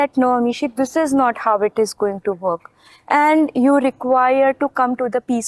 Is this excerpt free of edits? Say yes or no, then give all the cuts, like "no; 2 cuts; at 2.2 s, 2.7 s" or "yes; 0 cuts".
yes; 0 cuts